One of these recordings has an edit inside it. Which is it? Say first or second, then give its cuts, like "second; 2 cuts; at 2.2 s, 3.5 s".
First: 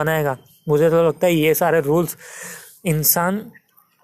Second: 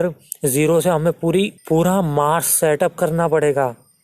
second; 1 cut; at 1.6 s